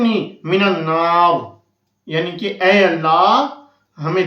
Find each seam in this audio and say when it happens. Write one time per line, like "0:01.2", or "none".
none